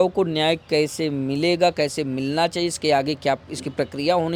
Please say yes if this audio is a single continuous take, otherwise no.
yes